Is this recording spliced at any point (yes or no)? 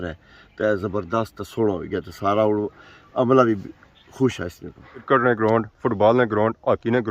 yes